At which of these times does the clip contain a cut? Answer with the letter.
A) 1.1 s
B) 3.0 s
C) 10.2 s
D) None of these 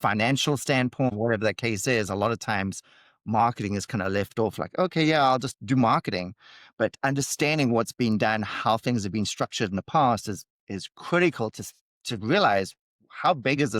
A